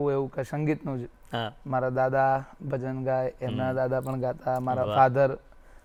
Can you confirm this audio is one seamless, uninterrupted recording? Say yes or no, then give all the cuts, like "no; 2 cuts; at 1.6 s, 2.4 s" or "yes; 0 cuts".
yes; 0 cuts